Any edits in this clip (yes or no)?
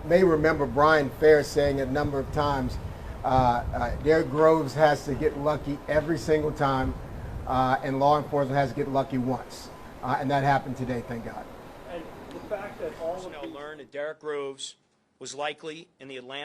yes